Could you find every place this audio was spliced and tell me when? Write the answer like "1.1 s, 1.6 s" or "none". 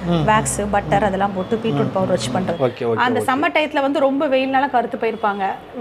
2.5 s